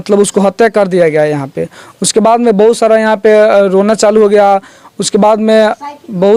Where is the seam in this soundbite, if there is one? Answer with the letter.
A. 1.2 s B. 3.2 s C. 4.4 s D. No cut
D